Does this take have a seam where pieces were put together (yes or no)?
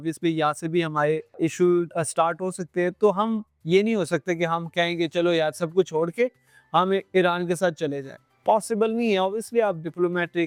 no